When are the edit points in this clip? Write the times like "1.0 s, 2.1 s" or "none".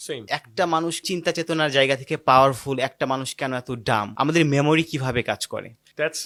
none